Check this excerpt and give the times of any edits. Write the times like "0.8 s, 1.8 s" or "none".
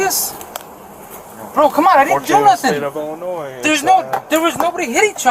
none